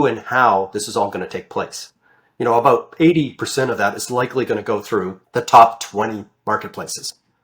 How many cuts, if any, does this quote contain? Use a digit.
1